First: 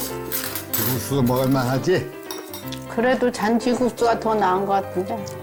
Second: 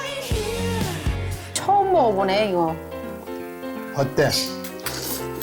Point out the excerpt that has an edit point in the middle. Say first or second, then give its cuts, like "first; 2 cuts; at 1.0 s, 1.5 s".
second; 1 cut; at 1.6 s